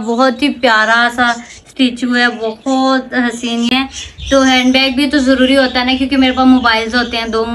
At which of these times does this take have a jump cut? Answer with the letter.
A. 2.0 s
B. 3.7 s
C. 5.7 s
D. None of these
B